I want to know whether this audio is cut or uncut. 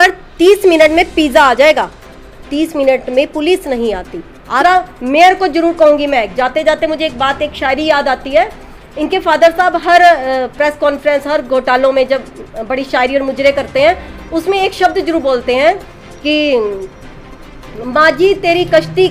cut